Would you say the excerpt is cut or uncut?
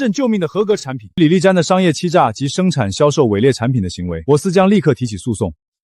cut